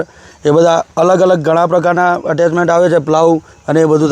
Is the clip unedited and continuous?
yes; 0 cuts

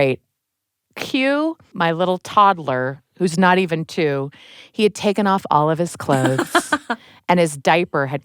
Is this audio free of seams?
no; 1 cut; at 1.7 s

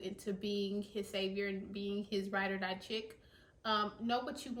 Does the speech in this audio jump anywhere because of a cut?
no; 0 cuts

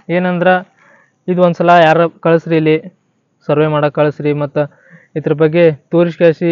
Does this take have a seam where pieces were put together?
no; 0 cuts

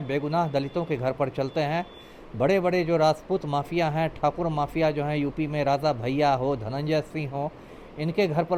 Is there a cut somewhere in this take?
no; 0 cuts

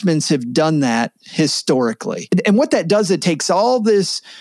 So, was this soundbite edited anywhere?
yes; 1 cut; at 2.3 s

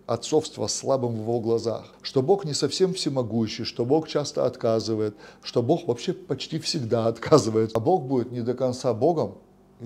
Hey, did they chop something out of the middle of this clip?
yes; 2 cuts; at 1.9 s, 7.7 s

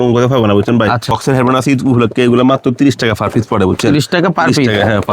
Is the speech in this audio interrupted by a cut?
yes; 1 cut; at 1.2 s

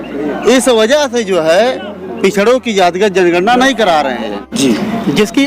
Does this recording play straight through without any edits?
no; 1 cut; at 4.5 s

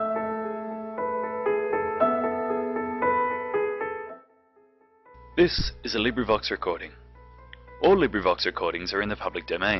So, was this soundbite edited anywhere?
no; 0 cuts

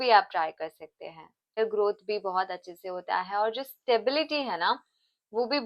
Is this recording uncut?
no; 1 cut; at 1.6 s

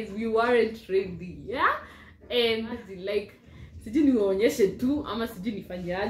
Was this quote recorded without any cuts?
no; 1 cut; at 2.9 s

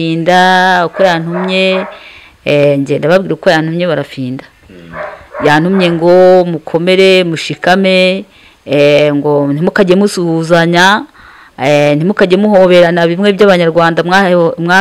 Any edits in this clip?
no; 0 cuts

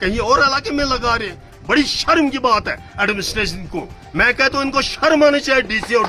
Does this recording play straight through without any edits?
yes; 0 cuts

